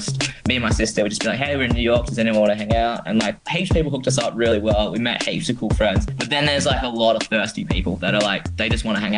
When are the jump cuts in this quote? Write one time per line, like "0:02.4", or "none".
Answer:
none